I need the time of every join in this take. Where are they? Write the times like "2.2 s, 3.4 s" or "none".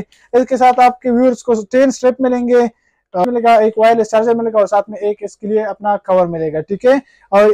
3.2 s

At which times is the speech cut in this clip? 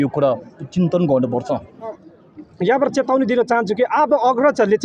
2.1 s

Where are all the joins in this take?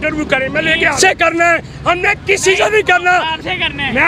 0.9 s

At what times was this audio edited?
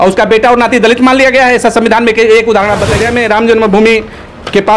3.0 s

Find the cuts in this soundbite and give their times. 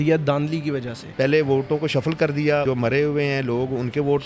1.0 s, 2.6 s

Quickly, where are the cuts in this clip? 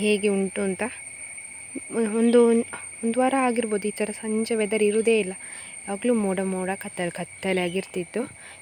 none

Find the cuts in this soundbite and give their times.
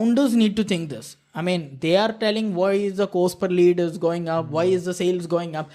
none

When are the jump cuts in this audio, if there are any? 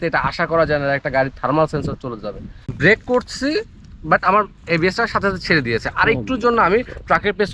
2.7 s

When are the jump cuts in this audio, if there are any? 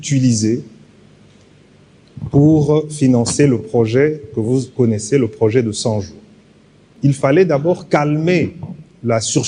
6.9 s

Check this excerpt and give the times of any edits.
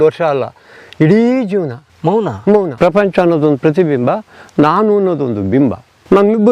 1.8 s, 2.7 s

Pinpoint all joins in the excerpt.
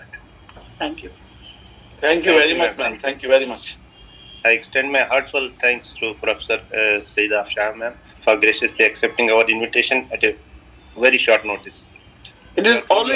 none

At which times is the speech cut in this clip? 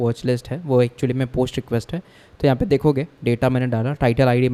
none

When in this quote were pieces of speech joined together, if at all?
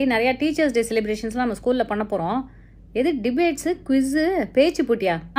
none

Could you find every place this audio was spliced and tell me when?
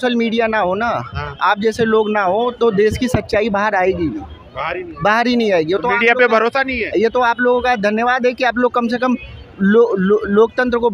none

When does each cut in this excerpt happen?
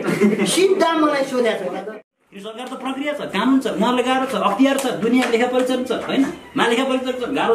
2.1 s

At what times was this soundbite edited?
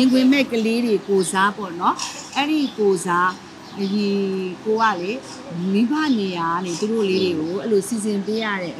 none

